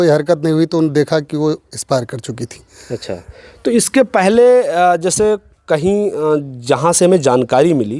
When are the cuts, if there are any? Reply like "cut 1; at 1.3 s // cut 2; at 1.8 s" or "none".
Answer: none